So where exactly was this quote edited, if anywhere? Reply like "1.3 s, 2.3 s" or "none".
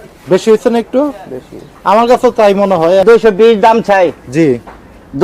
3.0 s